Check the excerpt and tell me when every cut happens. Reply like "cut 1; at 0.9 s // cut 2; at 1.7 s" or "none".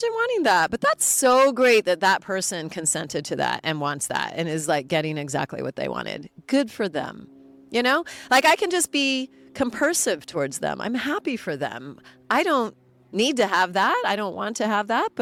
none